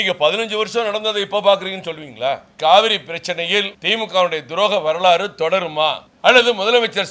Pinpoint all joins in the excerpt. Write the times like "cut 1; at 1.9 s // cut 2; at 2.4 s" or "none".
cut 1; at 2.5 s // cut 2; at 3.8 s // cut 3; at 6.1 s